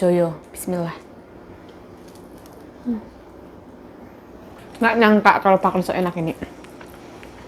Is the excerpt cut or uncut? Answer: cut